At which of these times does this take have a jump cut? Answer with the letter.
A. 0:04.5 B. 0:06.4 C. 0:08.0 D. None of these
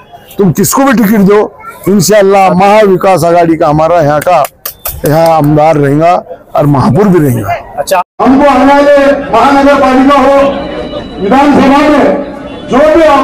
C